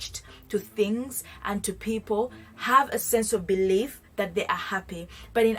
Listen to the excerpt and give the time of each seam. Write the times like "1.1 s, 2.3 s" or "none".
none